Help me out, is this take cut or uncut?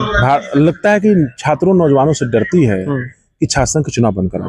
uncut